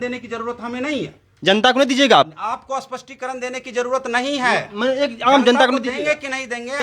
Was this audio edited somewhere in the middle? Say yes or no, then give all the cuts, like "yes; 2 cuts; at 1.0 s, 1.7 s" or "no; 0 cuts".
no; 0 cuts